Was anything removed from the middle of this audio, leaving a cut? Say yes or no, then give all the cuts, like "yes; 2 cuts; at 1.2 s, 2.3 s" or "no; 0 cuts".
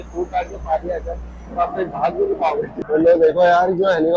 yes; 1 cut; at 2.8 s